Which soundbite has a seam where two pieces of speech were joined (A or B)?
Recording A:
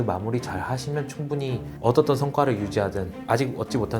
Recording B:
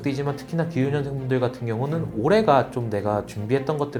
A